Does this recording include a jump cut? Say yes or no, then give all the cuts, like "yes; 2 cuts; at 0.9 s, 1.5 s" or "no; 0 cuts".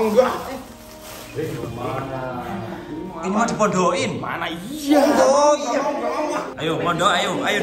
yes; 1 cut; at 6.5 s